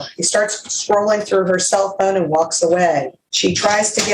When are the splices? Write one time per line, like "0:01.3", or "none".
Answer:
0:03.2